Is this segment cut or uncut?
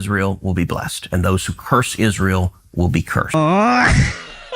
cut